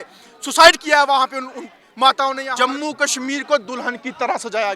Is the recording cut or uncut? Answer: cut